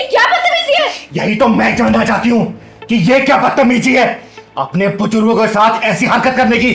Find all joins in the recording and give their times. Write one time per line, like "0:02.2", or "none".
none